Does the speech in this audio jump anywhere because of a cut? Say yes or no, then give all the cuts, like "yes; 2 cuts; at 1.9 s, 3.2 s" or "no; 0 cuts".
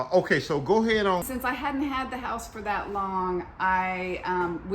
yes; 1 cut; at 1.2 s